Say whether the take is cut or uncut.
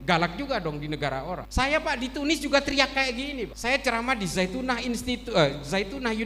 cut